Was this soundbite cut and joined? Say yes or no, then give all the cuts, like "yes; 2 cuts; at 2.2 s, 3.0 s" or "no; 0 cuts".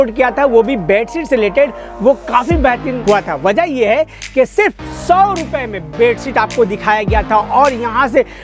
yes; 1 cut; at 2.9 s